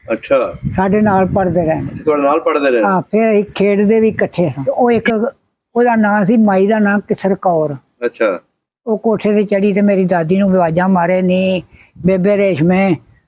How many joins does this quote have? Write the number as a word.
one